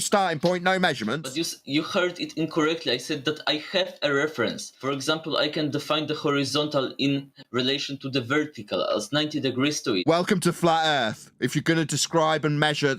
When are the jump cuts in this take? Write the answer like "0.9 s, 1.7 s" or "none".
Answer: 1.3 s, 4.7 s